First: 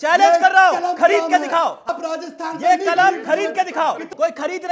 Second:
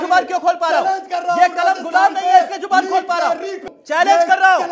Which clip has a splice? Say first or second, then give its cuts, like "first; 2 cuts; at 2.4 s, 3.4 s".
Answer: first; 1 cut; at 1.9 s